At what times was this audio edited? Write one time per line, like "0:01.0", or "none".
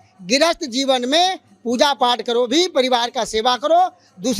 none

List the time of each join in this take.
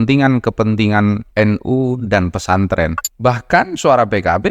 0:03.0

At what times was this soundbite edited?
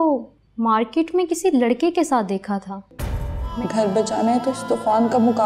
0:03.4

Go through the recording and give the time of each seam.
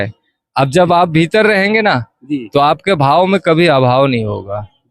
none

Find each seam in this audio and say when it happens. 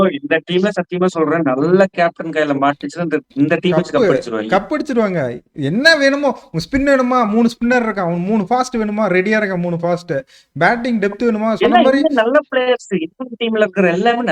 none

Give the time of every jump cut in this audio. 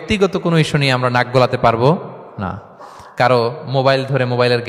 none

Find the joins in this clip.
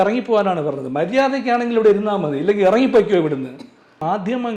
0:03.4

